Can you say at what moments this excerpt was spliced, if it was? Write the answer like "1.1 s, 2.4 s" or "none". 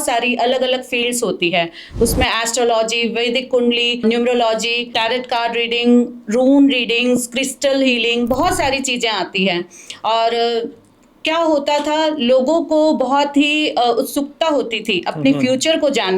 4.0 s, 4.9 s